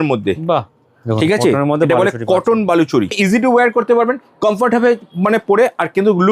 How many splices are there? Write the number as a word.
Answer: one